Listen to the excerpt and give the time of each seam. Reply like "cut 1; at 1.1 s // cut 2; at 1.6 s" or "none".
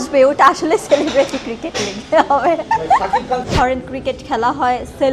cut 1; at 3.4 s